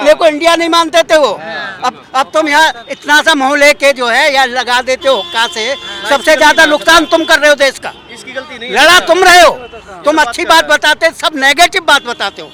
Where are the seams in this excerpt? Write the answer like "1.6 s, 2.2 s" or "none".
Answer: none